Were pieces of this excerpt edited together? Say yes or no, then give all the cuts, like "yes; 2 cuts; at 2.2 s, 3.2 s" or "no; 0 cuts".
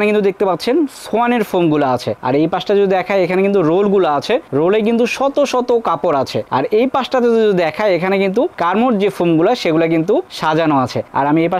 yes; 1 cut; at 2.2 s